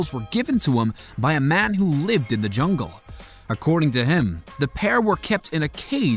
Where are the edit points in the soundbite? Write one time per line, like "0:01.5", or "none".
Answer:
0:03.8